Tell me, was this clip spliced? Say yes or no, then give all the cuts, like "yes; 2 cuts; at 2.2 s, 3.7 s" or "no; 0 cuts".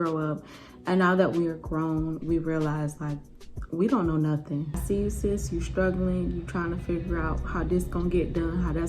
yes; 1 cut; at 4.8 s